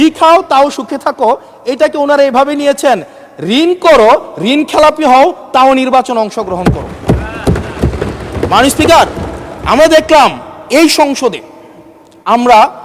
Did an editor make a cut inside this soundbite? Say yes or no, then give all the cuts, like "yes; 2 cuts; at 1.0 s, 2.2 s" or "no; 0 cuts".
no; 0 cuts